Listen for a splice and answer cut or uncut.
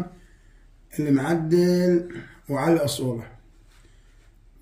uncut